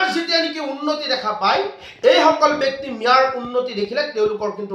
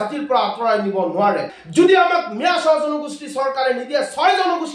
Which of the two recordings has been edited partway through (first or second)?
second